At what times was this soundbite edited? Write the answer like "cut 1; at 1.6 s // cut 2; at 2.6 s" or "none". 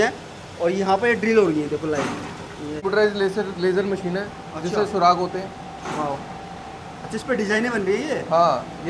cut 1; at 2.8 s